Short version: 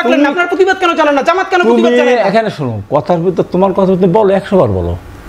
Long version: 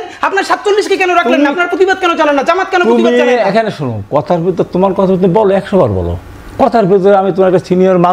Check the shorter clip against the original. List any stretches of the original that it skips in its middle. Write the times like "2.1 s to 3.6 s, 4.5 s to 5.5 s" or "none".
none